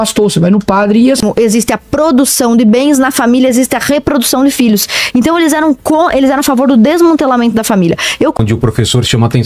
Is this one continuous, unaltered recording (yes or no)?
no